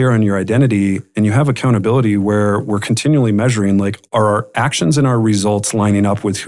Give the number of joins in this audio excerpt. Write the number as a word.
zero